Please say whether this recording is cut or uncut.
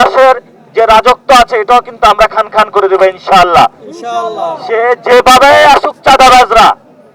uncut